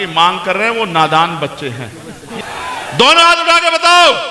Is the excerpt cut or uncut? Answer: cut